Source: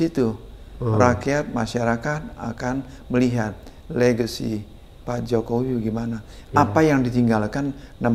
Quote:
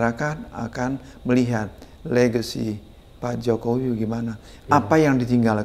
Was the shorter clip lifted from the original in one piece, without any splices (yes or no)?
yes